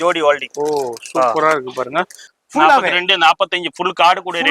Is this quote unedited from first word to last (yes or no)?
no